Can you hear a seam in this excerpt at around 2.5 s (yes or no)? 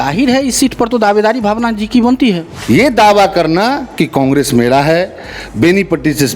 yes